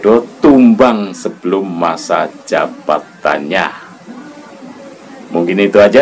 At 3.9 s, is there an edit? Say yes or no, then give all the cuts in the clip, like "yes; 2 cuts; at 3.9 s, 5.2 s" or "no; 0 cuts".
no; 0 cuts